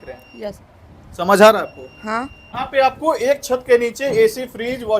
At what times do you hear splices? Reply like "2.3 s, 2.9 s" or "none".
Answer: 2.4 s